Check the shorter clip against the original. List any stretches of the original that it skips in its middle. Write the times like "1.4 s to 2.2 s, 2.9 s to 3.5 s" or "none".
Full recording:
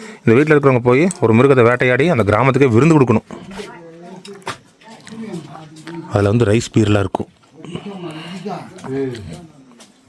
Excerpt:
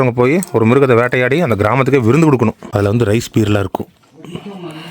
3.3 s to 6.0 s